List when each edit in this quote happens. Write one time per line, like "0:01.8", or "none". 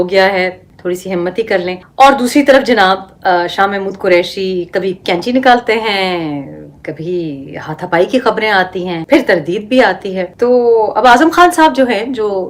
none